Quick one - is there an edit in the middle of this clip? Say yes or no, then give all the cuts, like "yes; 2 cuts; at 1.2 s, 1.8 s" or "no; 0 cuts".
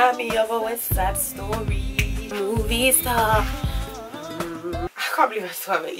yes; 2 cuts; at 2.3 s, 4.9 s